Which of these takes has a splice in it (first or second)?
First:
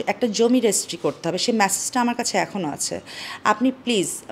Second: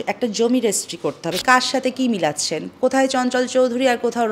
second